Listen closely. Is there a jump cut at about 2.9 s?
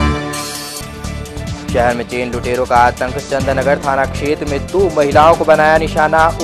no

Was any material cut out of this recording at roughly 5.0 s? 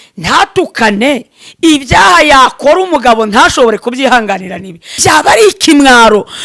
yes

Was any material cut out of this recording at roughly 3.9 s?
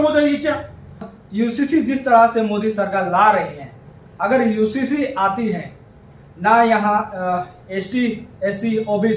no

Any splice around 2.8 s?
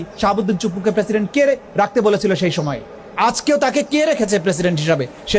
no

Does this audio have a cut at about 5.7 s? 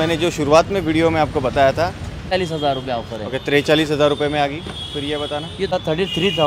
yes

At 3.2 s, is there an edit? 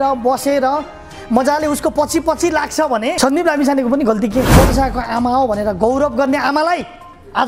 yes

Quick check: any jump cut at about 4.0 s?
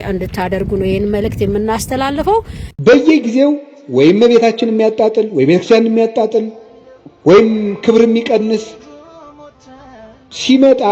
no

